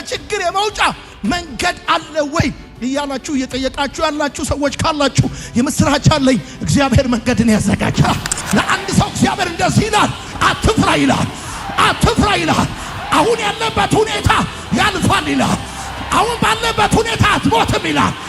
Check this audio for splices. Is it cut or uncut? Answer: cut